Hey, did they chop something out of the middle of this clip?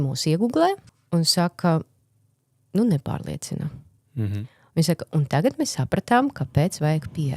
yes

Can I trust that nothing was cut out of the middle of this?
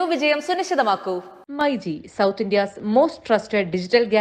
yes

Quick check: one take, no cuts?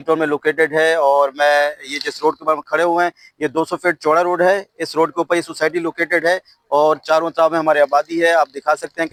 yes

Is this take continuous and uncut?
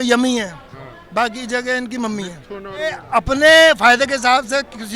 no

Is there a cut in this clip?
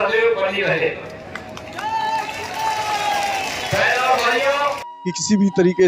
yes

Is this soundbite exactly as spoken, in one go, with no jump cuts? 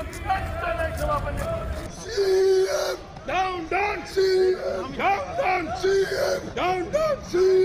no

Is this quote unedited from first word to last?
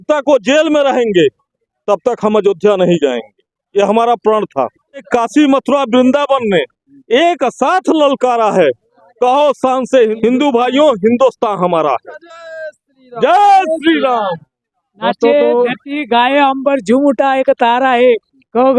no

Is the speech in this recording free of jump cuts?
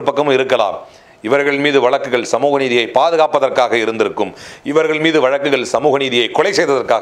yes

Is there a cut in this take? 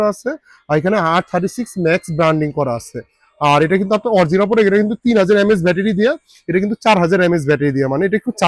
no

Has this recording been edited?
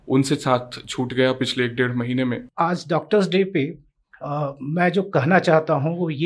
yes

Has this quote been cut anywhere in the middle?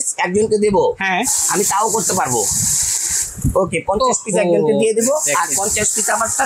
no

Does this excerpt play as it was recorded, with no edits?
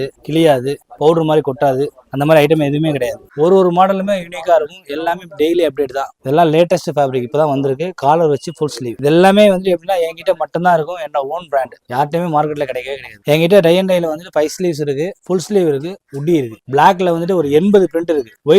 no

